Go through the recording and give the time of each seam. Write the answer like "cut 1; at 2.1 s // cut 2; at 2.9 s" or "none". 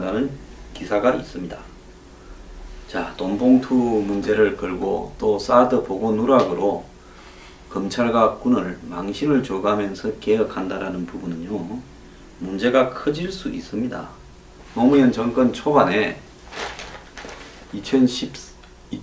cut 1; at 10.1 s